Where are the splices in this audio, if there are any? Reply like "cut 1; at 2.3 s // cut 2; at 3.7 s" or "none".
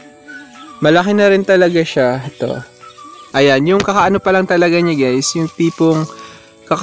cut 1; at 3.1 s